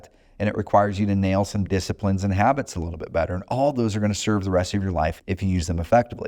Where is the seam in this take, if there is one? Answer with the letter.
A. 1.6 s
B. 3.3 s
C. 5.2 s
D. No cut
C